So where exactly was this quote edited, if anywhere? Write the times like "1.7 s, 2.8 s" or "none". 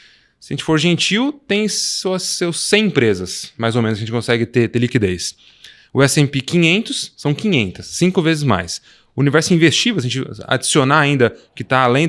none